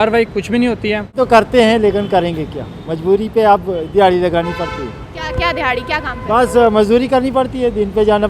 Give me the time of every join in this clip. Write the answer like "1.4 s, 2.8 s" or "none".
1.1 s